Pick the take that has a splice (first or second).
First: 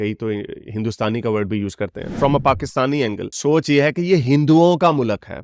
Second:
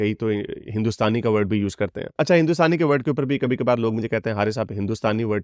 first